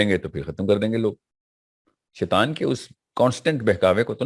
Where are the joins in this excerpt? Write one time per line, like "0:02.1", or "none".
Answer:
none